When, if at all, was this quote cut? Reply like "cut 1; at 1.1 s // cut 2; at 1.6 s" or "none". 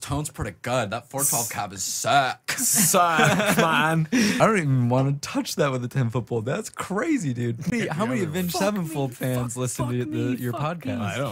cut 1; at 4.4 s // cut 2; at 7.7 s